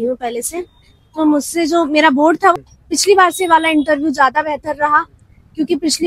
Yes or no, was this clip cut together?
yes